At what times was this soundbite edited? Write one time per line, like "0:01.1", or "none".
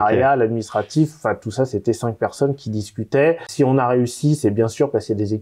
0:03.5